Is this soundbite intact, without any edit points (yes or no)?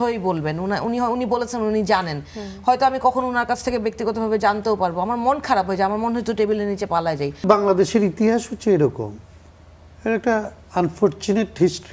no